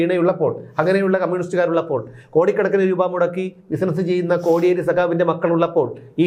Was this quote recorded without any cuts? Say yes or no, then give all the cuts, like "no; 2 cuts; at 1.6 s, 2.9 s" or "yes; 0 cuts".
yes; 0 cuts